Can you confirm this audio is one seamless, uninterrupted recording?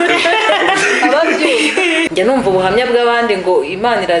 no; 1 cut; at 2.1 s

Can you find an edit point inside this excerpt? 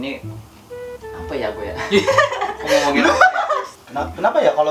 yes; 1 cut; at 3.8 s

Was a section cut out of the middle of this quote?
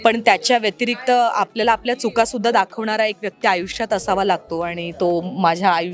no; 0 cuts

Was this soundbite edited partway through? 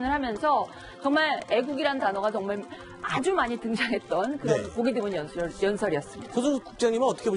yes; 1 cut; at 5.7 s

